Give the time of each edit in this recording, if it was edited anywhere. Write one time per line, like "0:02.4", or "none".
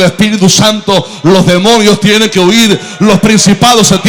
none